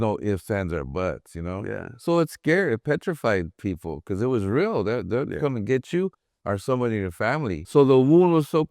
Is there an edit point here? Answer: yes; 1 cut; at 7.6 s

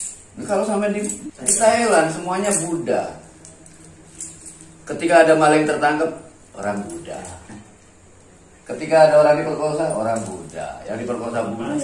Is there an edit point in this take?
yes; 1 cut; at 1.1 s

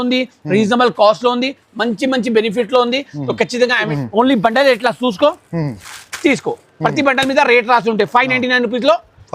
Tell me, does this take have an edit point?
yes; 1 cut; at 3.9 s

